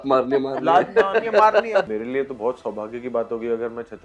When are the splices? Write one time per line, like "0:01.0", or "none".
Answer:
0:01.9